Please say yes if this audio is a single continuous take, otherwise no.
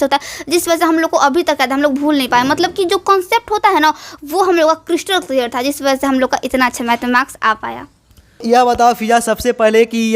no